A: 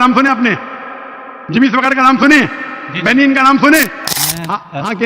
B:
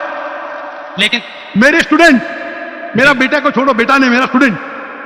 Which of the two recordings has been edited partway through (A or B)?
A